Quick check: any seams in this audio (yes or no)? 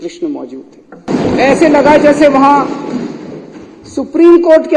yes